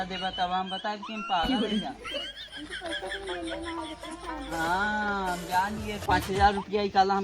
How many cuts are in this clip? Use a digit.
1